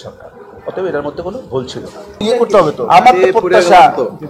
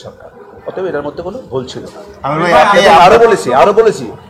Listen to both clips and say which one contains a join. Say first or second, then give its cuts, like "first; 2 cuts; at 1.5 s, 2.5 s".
first; 1 cut; at 2.2 s